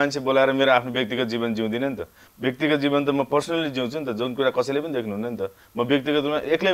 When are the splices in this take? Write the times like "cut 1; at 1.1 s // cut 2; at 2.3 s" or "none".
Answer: none